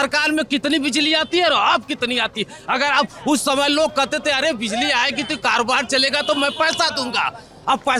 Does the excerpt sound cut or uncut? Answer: uncut